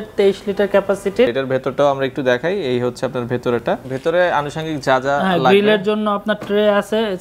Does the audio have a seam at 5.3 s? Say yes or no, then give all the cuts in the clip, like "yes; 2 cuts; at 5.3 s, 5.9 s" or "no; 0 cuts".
no; 2 cuts; at 1.3 s, 3.6 s